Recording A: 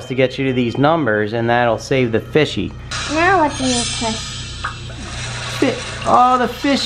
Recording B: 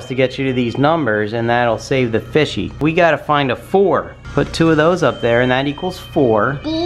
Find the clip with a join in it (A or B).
A